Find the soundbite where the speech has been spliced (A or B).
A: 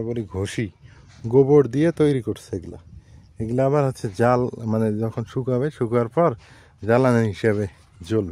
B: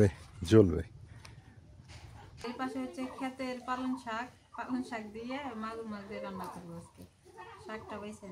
B